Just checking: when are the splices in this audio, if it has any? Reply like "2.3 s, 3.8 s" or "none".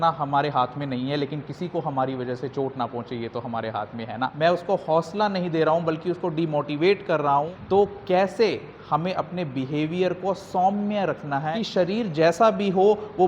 4.3 s, 7.0 s, 11.5 s